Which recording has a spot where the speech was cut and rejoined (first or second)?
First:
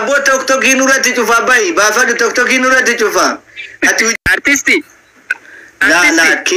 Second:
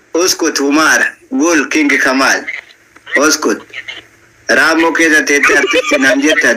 first